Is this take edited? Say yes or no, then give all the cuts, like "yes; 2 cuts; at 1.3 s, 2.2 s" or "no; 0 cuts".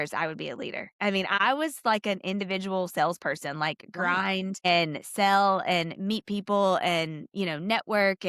yes; 2 cuts; at 1.4 s, 4.7 s